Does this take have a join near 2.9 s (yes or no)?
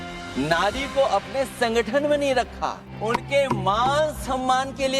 yes